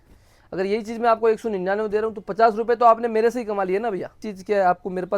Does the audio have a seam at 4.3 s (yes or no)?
yes